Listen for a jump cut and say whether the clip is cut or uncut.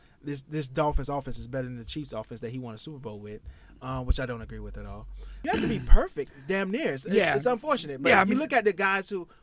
cut